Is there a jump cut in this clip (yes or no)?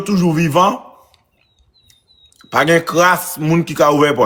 no